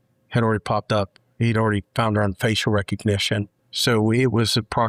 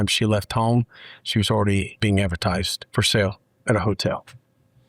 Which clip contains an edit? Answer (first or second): second